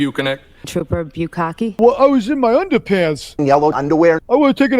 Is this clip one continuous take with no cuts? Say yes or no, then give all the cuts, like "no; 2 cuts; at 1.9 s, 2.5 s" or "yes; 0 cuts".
no; 1 cut; at 1.8 s